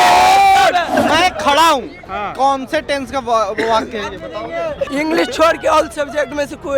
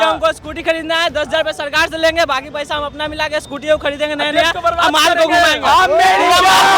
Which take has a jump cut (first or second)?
first